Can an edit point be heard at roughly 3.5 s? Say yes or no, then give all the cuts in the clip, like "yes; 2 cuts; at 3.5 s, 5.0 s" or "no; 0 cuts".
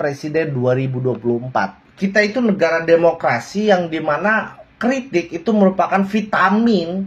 no; 1 cut; at 1.8 s